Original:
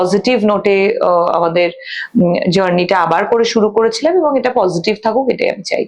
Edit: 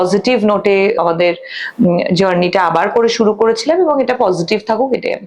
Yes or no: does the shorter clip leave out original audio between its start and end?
yes